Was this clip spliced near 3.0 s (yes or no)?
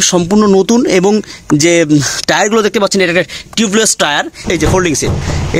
no